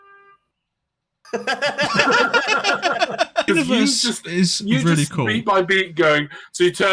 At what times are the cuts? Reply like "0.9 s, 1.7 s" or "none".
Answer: 3.5 s